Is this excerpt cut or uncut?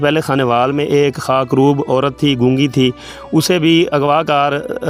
uncut